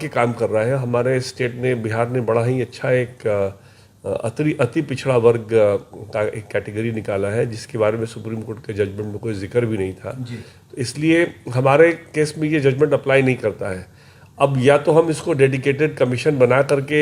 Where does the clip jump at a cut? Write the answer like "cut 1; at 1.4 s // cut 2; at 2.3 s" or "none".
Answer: none